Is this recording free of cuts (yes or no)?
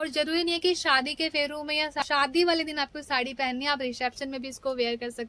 no